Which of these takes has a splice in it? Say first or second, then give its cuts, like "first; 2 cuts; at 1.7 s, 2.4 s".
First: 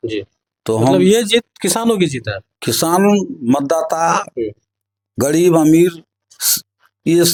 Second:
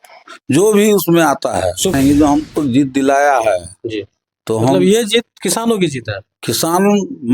second; 1 cut; at 1.9 s